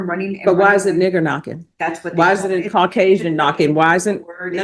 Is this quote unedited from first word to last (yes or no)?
yes